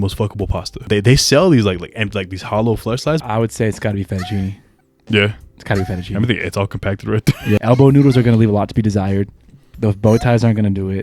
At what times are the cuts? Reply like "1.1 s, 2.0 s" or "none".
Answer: 0.9 s, 3.2 s, 7.6 s